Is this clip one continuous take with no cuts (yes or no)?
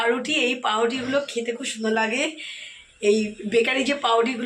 yes